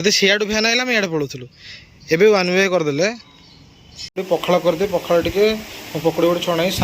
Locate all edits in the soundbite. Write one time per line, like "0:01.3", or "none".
0:04.0